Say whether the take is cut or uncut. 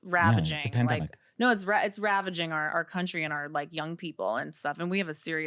uncut